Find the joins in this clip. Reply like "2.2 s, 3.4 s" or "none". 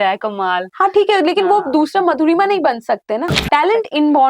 3.3 s